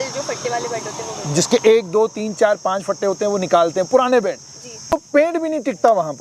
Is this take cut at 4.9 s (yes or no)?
yes